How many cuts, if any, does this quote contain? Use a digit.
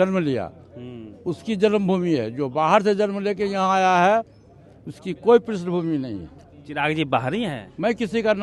0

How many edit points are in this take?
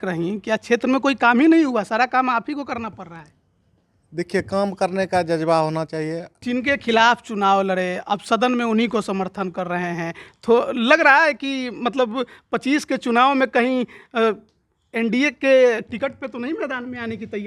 1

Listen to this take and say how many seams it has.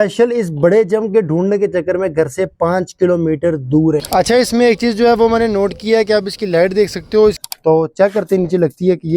2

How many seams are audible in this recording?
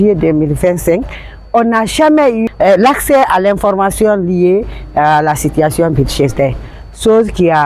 1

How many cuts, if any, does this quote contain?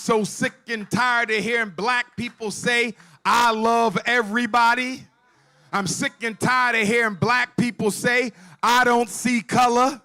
0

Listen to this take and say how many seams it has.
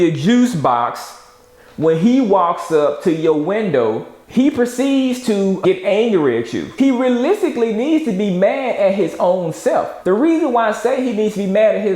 3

